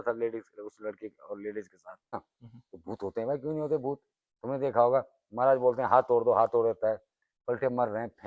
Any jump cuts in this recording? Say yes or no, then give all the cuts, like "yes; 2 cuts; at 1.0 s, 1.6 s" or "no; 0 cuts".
yes; 1 cut; at 2.1 s